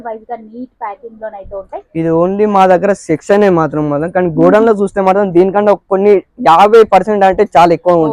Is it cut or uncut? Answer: uncut